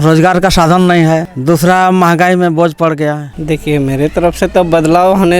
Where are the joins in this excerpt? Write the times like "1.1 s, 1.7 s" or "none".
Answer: 1.3 s, 3.3 s